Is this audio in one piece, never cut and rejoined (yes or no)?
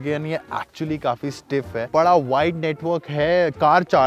no